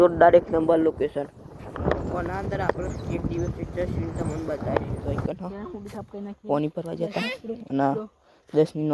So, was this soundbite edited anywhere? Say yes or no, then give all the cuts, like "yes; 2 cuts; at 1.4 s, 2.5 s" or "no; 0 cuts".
yes; 1 cut; at 5.3 s